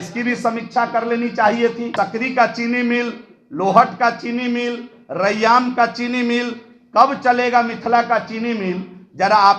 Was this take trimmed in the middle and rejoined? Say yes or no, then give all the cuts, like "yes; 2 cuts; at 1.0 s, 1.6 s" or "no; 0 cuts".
yes; 1 cut; at 1.9 s